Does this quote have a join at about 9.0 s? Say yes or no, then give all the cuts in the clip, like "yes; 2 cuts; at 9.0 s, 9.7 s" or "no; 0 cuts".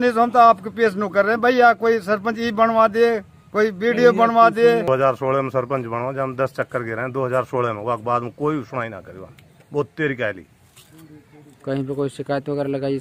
no; 1 cut; at 4.9 s